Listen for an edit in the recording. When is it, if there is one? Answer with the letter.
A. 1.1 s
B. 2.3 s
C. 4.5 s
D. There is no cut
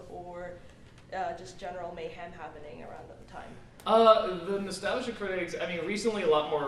B